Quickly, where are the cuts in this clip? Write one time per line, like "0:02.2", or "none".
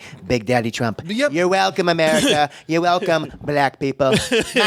none